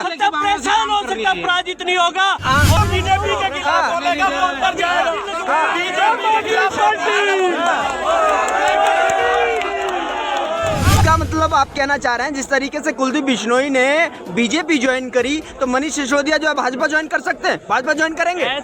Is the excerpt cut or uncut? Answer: cut